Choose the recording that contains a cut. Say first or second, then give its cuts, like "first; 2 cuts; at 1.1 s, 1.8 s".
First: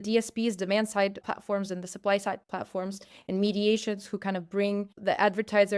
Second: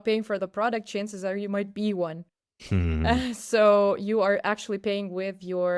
first; 2 cuts; at 1.2 s, 4.9 s